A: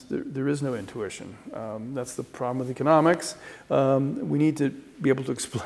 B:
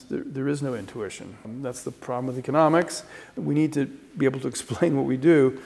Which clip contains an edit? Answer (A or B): B